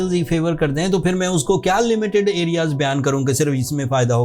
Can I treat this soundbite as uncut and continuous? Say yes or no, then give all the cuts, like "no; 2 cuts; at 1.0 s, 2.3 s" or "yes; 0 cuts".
yes; 0 cuts